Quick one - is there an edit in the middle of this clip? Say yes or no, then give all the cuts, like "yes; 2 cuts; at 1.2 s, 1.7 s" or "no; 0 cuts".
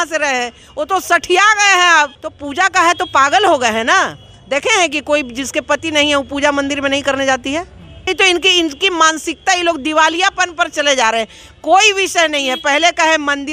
yes; 2 cuts; at 2.2 s, 8.1 s